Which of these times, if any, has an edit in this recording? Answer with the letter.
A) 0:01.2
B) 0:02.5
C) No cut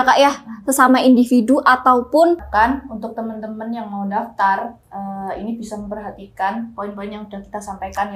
B